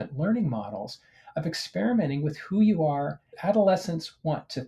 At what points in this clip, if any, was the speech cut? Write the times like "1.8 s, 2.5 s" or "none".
3.3 s